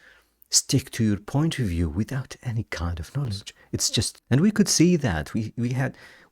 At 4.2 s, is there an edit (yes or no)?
yes